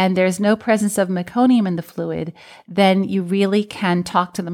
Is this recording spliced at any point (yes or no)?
no